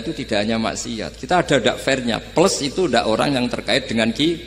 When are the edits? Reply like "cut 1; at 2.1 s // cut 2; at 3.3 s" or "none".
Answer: none